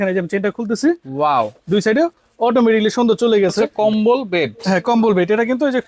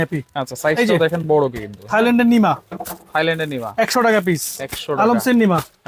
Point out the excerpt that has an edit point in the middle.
first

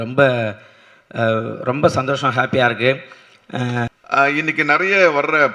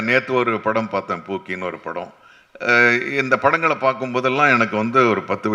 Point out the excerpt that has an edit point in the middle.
first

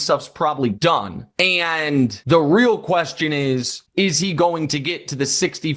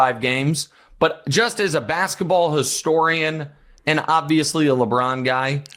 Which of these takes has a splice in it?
first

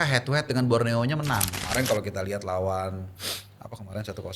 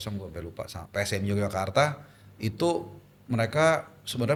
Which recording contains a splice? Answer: first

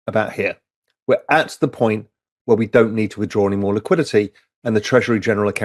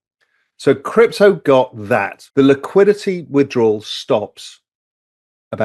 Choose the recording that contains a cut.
second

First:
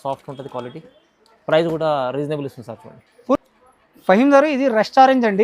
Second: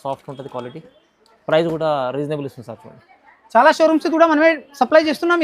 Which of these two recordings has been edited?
second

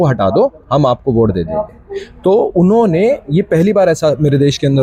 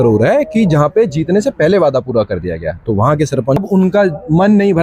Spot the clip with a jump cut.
second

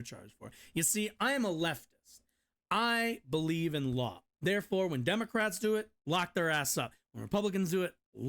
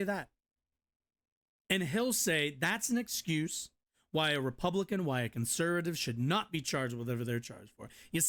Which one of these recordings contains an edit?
first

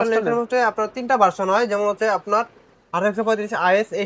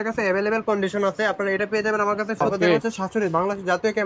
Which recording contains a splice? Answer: second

